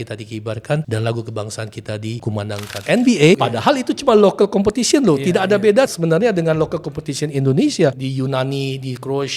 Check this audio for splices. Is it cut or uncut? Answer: cut